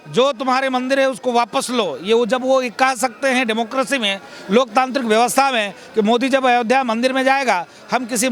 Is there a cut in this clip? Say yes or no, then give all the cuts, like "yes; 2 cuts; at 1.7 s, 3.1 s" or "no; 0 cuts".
no; 0 cuts